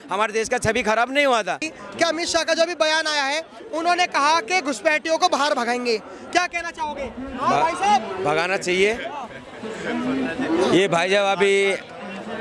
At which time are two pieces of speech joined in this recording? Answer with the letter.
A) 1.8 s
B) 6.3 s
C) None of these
A